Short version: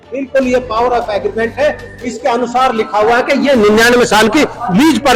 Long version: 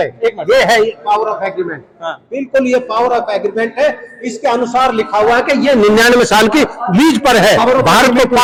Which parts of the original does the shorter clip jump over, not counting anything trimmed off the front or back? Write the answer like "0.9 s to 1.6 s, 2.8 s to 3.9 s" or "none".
none